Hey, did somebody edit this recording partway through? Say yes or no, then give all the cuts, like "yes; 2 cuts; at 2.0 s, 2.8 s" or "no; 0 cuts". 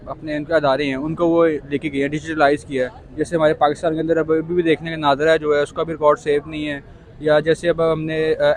no; 0 cuts